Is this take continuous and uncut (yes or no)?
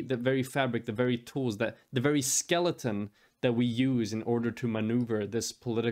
yes